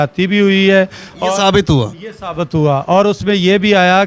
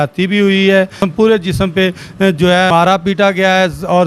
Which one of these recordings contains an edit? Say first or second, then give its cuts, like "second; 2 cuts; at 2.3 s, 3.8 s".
second; 2 cuts; at 1.0 s, 2.7 s